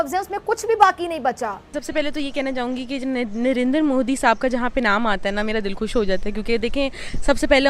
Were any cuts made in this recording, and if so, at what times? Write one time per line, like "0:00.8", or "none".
0:01.8